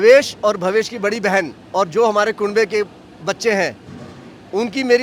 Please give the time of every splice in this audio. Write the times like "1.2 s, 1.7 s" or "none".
none